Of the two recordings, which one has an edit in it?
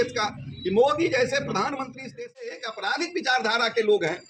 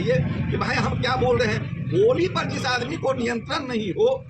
first; 1 cut; at 2.1 s

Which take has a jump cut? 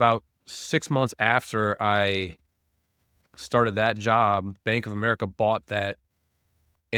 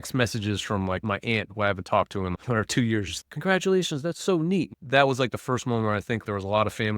second; 5 cuts; at 1.0 s, 2.4 s, 3.2 s, 4.7 s, 6.2 s

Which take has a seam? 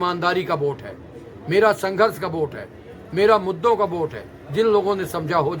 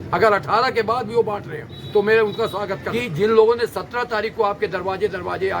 second; 1 cut; at 2.8 s

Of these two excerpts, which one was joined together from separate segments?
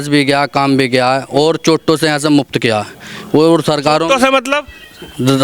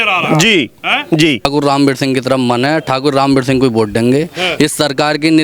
second; 1 cut; at 1.4 s

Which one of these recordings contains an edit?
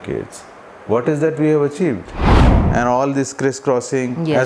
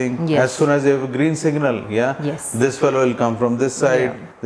first; 1 cut; at 2.5 s

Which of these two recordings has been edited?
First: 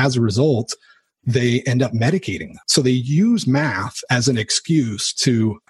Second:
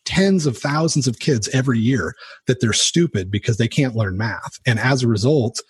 first; 1 cut; at 2.6 s

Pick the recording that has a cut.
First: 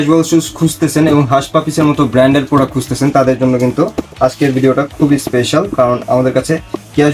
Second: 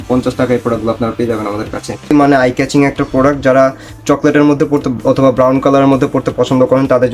second; 1 cut; at 2.1 s

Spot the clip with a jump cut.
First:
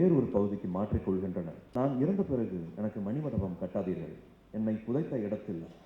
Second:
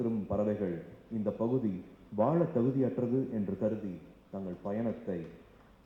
first; 1 cut; at 1.6 s

